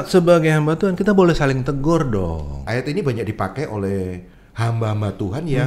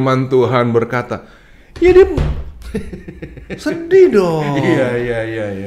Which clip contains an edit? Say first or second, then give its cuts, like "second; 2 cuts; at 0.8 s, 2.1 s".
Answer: first; 1 cut; at 2.7 s